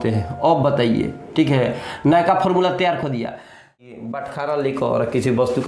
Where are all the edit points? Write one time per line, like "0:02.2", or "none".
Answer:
0:03.8